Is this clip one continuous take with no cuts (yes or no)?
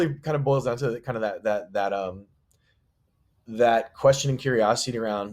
yes